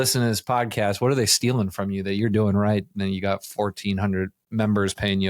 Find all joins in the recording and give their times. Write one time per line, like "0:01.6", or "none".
0:04.4